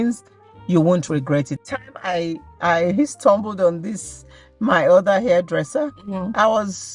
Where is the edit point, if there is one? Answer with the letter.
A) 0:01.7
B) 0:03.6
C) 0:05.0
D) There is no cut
A